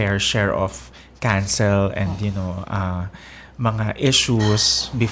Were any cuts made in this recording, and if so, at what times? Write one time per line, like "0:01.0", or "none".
none